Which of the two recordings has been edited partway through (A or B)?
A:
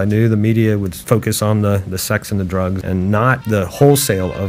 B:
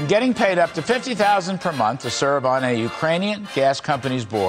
A